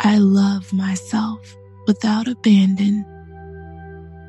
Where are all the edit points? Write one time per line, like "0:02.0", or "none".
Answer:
0:03.1